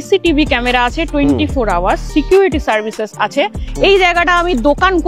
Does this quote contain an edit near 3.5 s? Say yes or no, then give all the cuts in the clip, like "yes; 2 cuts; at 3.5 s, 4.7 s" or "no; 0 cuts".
yes; 1 cut; at 3.5 s